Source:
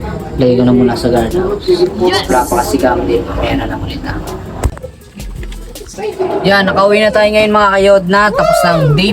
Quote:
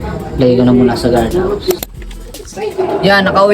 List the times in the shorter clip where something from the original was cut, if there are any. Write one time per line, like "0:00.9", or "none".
0:01.7